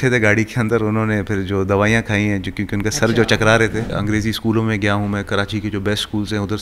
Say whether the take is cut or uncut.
cut